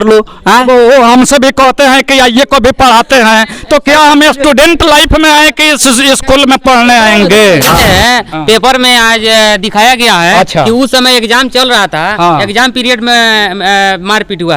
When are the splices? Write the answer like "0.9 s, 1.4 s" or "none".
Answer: 7.8 s